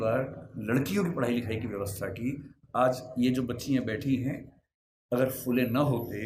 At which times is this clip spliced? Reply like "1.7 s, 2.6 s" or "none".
none